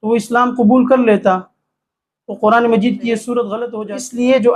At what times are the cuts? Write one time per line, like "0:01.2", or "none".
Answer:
0:03.6